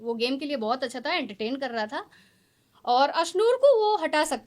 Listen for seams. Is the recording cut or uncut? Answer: uncut